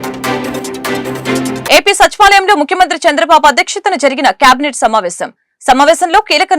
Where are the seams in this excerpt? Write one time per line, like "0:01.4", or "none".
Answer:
0:01.6